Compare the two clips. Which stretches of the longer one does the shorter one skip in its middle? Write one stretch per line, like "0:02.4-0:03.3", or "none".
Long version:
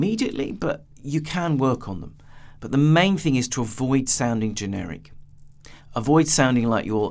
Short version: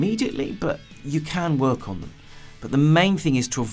none

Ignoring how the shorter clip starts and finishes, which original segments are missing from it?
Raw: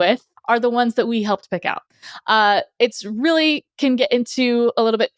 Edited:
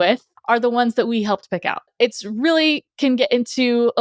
0:01.9-0:02.7

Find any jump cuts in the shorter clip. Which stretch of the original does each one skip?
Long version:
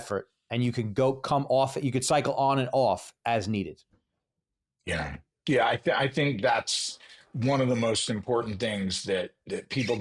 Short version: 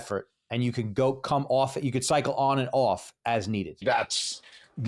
0:03.8-0:06.4

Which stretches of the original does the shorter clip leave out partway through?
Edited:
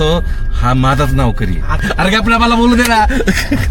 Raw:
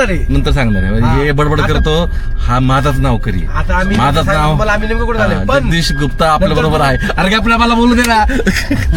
0:03.7-0:07.0

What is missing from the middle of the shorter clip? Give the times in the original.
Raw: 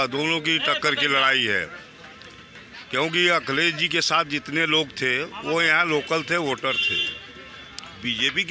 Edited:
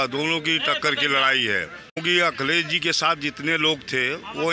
0:02.0-0:03.1

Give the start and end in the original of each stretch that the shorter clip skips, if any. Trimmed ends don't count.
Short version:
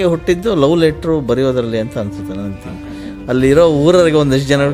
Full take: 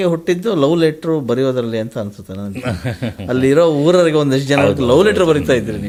none

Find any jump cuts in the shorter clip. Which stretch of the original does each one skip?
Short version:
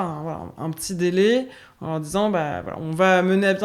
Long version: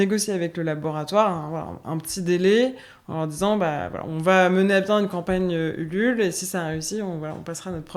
none

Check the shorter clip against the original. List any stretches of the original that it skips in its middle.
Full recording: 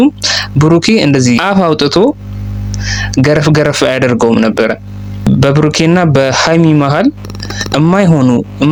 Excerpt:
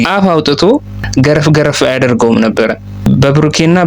0:02.3-0:03.0
0:04.9-0:05.1

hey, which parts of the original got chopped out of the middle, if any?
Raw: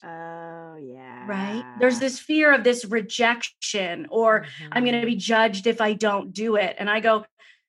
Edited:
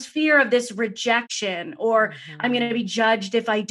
0:03.5-0:03.7

